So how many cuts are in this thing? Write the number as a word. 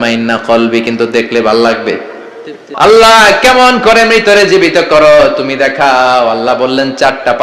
one